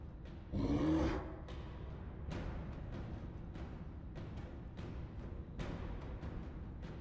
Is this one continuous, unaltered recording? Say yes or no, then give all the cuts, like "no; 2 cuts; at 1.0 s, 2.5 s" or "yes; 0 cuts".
no; 1 cut; at 1.5 s